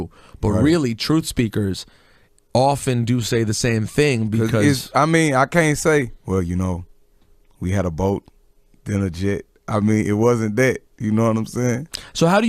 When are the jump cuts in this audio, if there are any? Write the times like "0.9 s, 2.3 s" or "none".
11.1 s